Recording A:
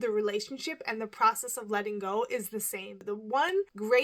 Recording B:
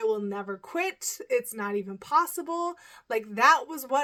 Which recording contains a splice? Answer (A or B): A